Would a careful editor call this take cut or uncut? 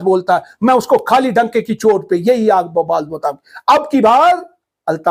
uncut